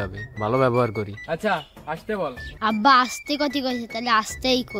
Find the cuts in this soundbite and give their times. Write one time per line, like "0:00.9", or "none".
0:02.5

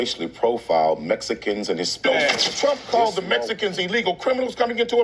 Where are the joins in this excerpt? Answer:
0:02.0

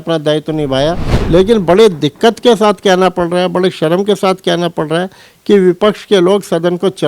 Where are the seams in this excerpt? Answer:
0:01.1

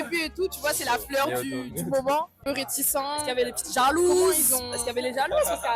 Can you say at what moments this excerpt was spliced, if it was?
0:02.4

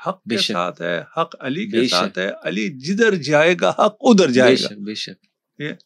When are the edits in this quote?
none

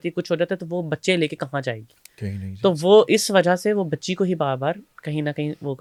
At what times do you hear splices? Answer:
none

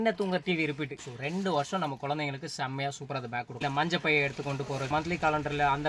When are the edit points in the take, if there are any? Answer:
0:01.0
0:03.5
0:04.9

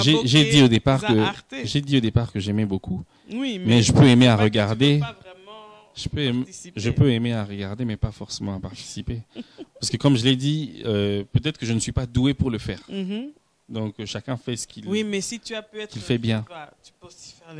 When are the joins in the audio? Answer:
none

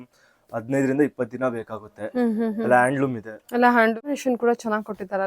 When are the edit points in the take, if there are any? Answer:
0:04.1

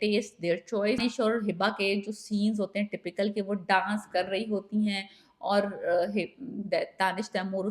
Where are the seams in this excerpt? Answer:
0:01.0

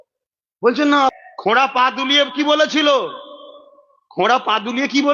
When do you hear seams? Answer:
0:01.1

